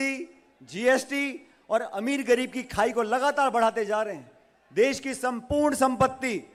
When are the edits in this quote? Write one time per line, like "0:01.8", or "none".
none